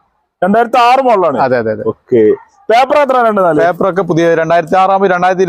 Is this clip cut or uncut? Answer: uncut